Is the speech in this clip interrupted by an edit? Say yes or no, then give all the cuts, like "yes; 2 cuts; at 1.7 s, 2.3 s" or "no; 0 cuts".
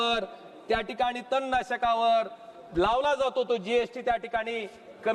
no; 0 cuts